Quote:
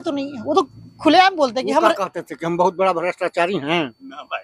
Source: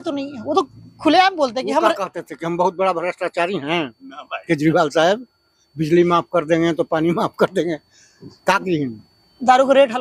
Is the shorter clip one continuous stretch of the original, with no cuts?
yes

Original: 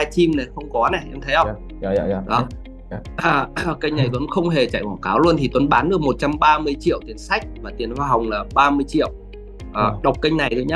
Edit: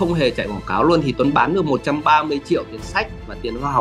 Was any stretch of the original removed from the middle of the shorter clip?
no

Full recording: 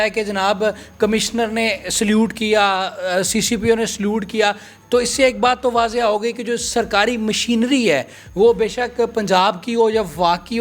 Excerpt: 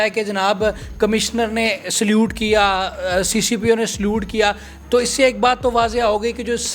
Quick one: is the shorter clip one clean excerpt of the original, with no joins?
yes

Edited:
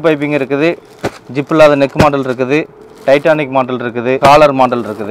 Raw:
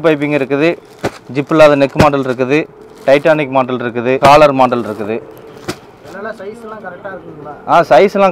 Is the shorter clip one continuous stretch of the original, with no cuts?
yes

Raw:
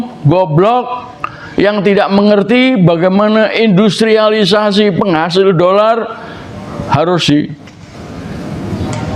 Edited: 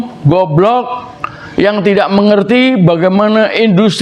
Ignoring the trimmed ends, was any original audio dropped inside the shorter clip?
no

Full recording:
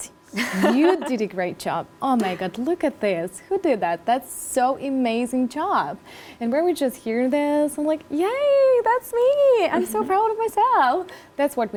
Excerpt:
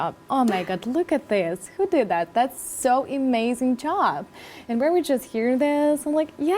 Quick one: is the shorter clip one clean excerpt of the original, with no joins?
yes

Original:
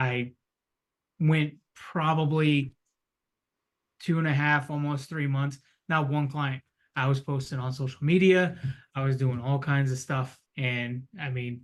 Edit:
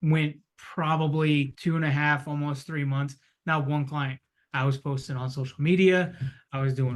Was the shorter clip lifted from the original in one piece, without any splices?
no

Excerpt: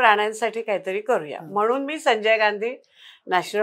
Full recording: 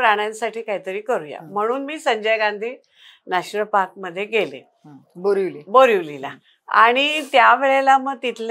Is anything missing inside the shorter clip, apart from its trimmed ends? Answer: no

